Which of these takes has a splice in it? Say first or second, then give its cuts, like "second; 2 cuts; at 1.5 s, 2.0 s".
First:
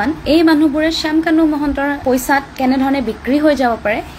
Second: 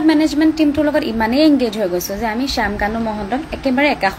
first; 1 cut; at 2.0 s